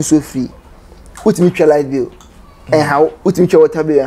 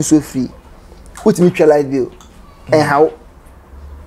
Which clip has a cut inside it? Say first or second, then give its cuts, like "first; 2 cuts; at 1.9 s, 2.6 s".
first; 1 cut; at 3.2 s